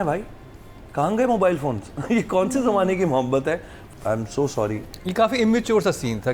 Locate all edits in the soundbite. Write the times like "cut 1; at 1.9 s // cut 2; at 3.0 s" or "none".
cut 1; at 3.8 s